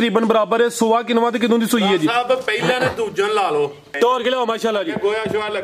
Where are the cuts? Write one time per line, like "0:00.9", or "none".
0:03.9